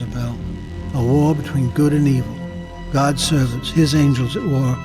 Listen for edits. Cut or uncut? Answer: cut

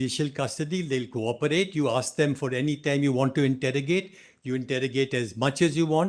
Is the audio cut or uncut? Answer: uncut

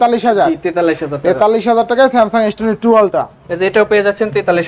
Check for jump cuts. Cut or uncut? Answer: uncut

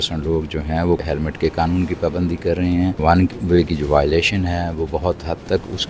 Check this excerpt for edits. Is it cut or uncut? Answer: cut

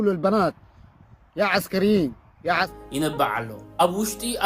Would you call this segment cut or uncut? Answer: cut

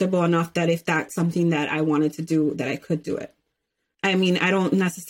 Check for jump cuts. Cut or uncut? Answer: cut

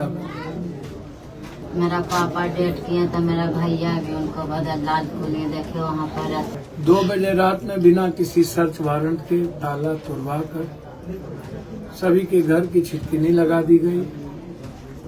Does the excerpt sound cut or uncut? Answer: cut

